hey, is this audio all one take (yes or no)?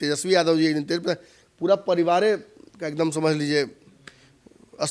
yes